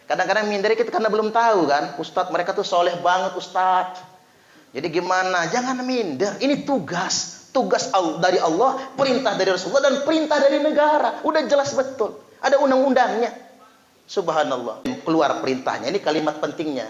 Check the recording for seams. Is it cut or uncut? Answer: cut